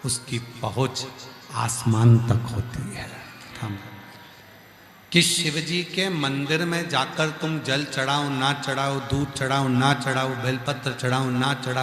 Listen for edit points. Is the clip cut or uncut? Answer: cut